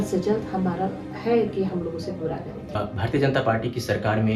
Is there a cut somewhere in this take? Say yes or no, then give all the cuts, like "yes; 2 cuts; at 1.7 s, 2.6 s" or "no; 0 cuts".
yes; 1 cut; at 2.7 s